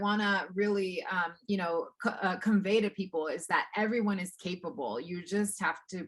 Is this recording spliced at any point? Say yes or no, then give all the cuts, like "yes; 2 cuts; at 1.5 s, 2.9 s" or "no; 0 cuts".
no; 0 cuts